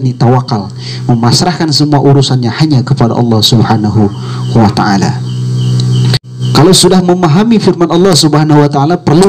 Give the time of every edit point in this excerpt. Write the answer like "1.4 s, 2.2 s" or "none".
6.2 s